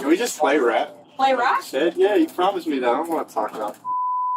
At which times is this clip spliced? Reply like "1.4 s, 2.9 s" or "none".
1.0 s